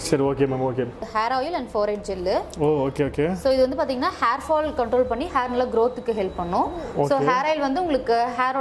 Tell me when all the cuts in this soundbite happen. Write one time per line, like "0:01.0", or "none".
0:01.1